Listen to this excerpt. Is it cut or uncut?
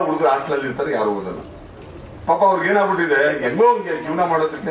uncut